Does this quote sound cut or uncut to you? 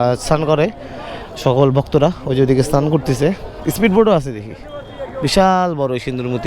uncut